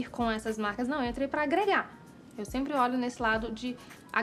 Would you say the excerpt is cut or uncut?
uncut